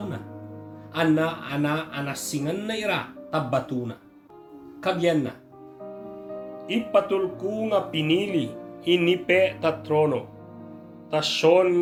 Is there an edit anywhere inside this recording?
no; 0 cuts

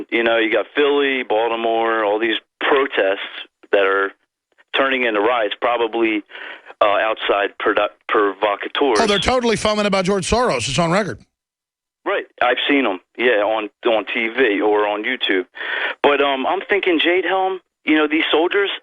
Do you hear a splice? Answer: yes; 1 cut; at 13.4 s

